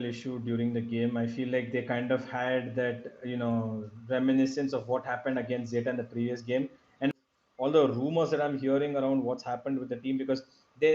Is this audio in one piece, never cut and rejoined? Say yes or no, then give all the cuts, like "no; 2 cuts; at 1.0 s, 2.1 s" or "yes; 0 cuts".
no; 1 cut; at 7.1 s